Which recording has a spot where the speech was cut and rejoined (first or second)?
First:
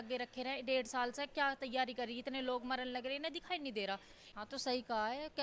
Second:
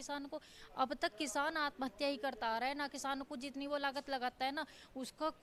first